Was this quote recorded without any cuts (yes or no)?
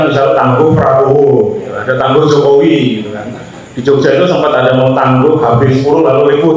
yes